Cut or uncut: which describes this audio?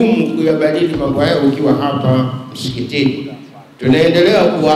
uncut